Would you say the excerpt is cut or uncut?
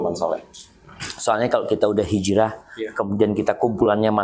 uncut